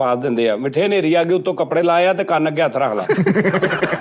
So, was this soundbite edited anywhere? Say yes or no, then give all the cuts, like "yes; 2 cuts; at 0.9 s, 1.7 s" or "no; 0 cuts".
no; 0 cuts